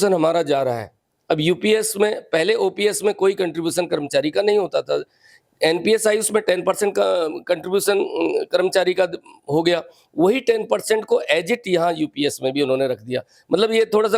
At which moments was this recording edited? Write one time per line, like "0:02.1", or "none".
none